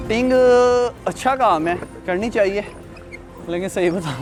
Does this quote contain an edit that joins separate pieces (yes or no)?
no